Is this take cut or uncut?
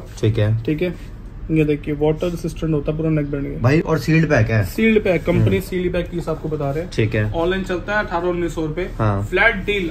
uncut